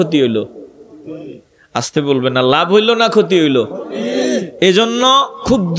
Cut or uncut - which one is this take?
uncut